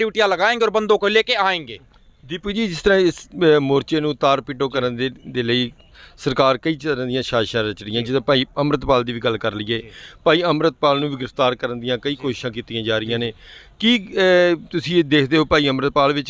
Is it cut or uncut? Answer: uncut